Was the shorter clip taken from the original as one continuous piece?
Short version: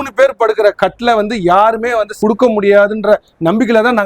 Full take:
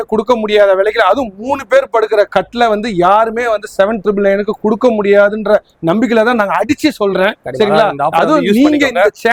no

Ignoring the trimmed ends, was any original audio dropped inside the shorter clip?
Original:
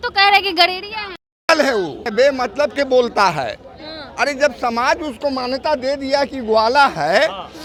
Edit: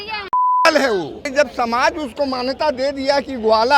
yes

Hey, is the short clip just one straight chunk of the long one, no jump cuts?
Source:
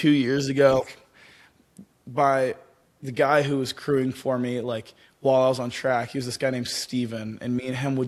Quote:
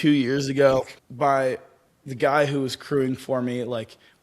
no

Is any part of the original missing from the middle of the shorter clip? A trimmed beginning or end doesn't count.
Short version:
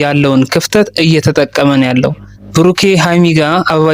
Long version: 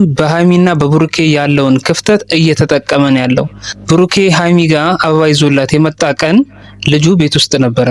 no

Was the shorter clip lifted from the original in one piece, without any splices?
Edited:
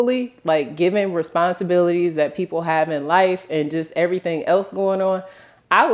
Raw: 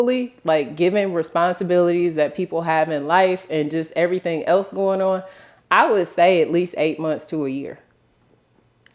yes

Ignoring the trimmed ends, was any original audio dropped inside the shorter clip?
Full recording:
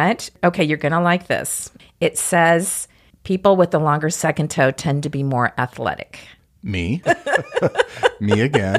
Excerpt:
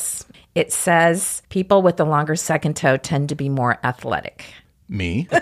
yes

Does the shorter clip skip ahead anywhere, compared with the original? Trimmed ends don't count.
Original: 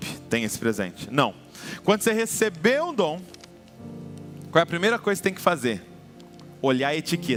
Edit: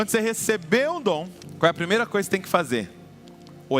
yes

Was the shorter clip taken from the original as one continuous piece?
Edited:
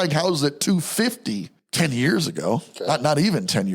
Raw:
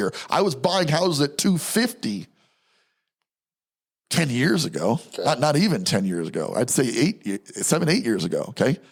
no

